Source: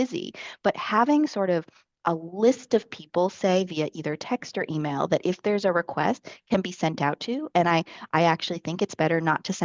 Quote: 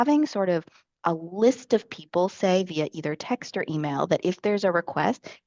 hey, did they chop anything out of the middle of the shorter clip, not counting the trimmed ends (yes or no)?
no